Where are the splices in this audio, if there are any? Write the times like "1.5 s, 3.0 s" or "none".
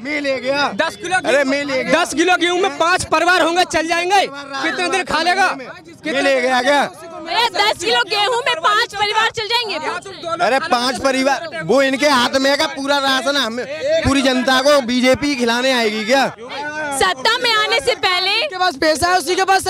none